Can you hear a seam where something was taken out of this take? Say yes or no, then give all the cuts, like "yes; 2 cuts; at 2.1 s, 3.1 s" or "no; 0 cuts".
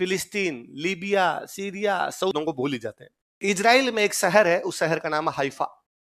yes; 1 cut; at 2.3 s